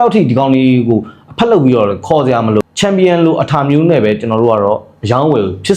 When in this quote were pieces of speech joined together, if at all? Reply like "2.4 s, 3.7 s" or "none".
2.6 s